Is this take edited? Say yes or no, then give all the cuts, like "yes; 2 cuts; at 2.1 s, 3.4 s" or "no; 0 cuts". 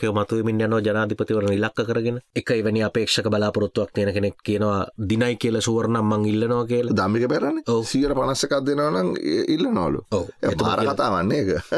yes; 1 cut; at 2.2 s